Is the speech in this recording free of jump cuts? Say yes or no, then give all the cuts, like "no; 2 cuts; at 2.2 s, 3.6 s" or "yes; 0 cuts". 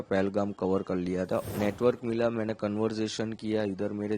no; 1 cut; at 1.5 s